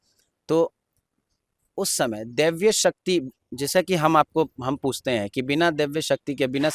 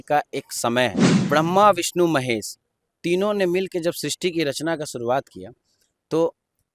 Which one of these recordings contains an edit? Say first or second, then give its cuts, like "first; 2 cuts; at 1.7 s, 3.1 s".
second; 1 cut; at 1.2 s